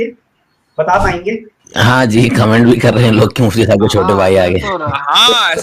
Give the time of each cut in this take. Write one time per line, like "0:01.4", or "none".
0:01.6